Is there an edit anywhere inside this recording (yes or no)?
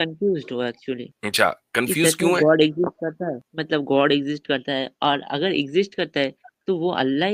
yes